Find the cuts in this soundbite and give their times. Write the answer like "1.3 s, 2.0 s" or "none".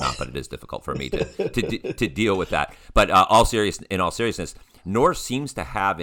none